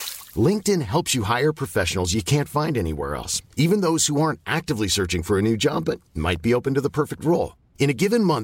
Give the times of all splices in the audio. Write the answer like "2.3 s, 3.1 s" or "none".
none